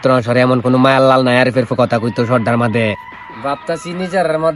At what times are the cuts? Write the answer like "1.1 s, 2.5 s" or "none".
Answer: 3.1 s